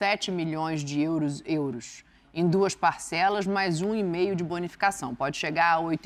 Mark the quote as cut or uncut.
uncut